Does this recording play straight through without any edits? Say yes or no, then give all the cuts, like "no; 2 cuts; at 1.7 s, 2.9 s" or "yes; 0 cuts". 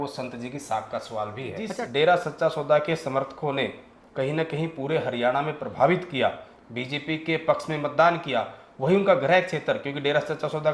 no; 1 cut; at 1.7 s